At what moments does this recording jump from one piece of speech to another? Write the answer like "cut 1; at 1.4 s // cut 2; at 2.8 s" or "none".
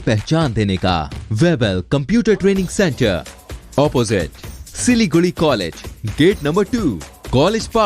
cut 1; at 1.2 s